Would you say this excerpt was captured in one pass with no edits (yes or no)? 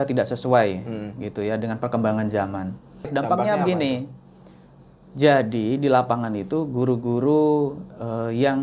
no